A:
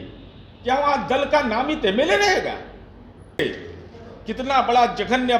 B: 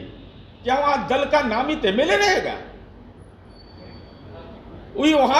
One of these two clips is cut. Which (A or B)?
A